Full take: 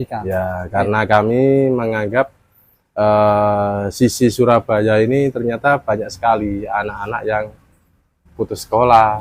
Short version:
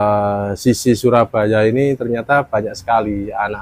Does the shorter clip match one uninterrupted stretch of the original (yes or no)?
yes